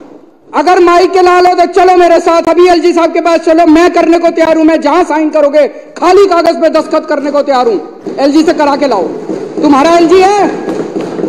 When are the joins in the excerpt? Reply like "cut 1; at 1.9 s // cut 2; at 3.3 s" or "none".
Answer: none